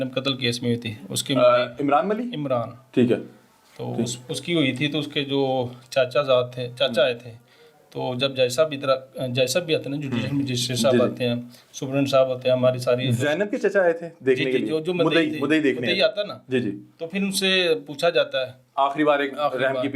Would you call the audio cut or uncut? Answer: uncut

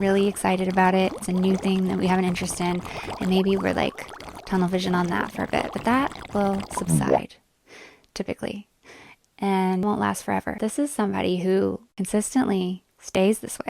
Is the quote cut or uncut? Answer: cut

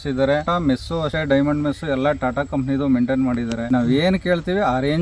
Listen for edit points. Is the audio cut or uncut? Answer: cut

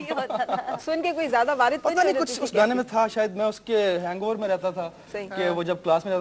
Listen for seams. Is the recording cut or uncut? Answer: uncut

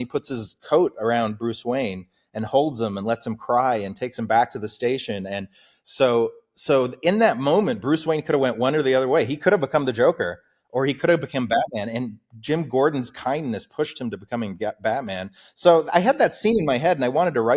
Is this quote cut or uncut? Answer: uncut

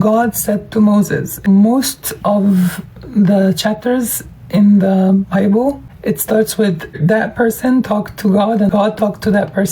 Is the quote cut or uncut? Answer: cut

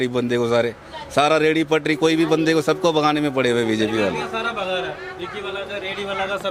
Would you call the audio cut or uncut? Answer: uncut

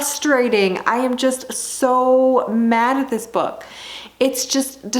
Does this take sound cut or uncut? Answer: uncut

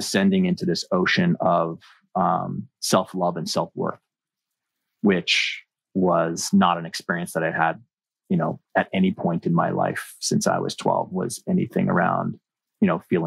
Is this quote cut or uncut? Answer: uncut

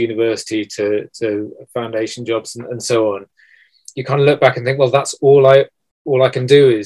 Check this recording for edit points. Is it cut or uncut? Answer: uncut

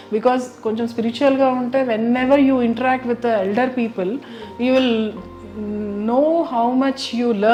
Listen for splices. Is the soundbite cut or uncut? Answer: uncut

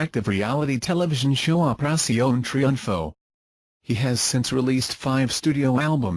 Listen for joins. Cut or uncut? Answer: cut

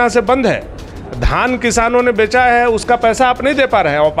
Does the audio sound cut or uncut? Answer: uncut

